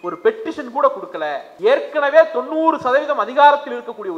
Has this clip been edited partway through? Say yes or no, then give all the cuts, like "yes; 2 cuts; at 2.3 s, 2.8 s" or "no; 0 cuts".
yes; 1 cut; at 1.5 s